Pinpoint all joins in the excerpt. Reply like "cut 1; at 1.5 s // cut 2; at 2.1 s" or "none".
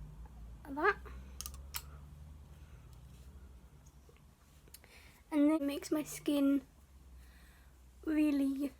cut 1; at 5.6 s